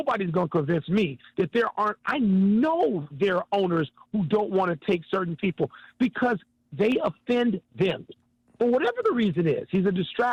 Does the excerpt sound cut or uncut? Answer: uncut